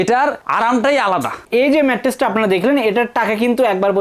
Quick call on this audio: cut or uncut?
cut